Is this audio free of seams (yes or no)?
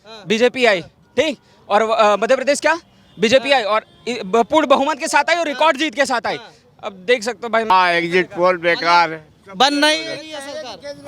no